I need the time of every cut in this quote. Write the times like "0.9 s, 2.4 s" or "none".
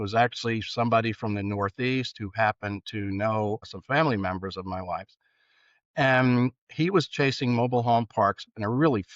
3.7 s